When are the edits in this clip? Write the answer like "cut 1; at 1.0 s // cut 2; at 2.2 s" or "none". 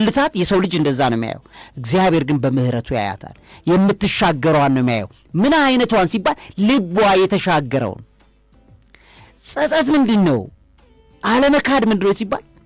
none